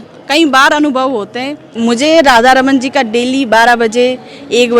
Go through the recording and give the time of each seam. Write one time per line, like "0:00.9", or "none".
0:01.6